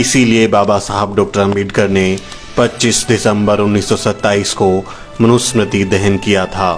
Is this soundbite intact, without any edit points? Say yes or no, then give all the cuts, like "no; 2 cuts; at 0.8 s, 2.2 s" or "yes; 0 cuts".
yes; 0 cuts